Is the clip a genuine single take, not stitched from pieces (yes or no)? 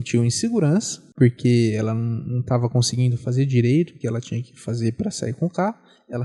yes